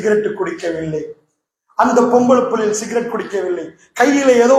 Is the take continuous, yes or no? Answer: yes